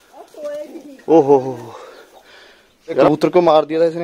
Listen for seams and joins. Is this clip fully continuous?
no; 1 cut; at 3.1 s

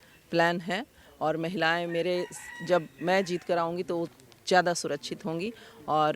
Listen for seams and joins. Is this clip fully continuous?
yes; 0 cuts

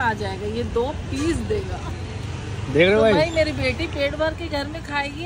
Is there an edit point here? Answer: no; 0 cuts

